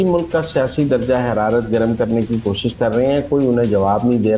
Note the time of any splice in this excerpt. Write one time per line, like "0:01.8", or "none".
none